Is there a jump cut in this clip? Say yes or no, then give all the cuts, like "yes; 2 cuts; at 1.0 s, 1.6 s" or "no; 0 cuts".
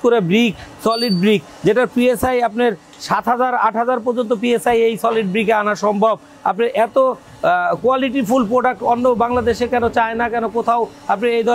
no; 0 cuts